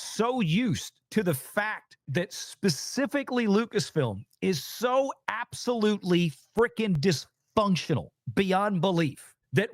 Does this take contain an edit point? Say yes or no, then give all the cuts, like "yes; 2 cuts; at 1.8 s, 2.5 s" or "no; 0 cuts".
yes; 1 cut; at 0.9 s